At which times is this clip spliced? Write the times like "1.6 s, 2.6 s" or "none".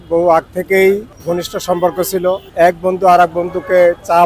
1.1 s, 2.5 s